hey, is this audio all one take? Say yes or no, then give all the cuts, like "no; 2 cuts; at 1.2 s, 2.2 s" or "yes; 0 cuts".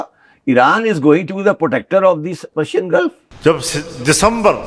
no; 1 cut; at 3.3 s